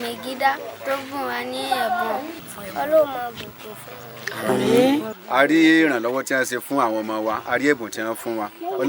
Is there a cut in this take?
yes; 2 cuts; at 2.4 s, 5.2 s

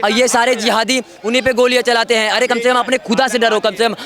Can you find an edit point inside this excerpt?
no; 0 cuts

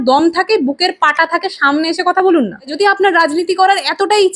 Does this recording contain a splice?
yes; 1 cut; at 2.7 s

